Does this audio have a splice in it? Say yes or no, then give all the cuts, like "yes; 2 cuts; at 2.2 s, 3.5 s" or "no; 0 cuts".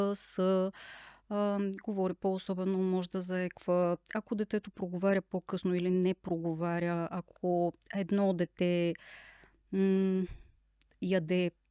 no; 0 cuts